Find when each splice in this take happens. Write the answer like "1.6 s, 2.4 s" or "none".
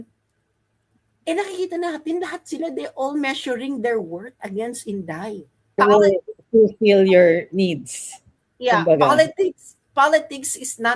5.8 s